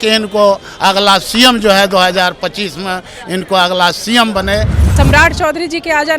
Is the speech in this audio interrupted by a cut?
yes; 1 cut; at 4.9 s

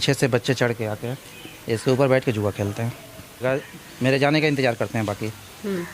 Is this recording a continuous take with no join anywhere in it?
no; 1 cut; at 3.4 s

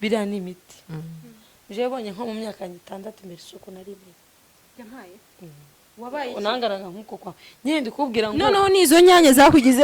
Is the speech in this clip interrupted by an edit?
yes; 1 cut; at 1.1 s

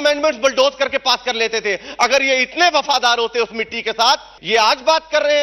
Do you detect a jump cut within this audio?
yes; 1 cut; at 4.3 s

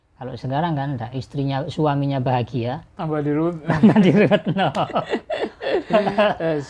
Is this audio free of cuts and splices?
yes; 0 cuts

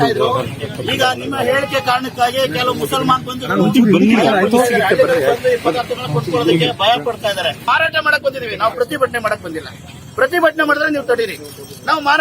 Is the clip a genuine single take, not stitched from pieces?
no; 1 cut; at 7.7 s

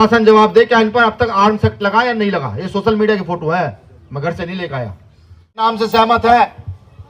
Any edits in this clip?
yes; 1 cut; at 5.6 s

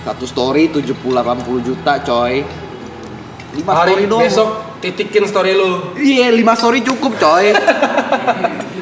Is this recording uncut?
yes; 0 cuts

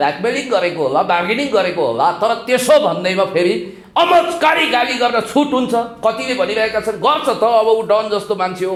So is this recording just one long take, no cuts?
yes; 0 cuts

